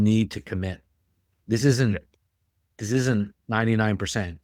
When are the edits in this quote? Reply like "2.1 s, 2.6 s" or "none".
none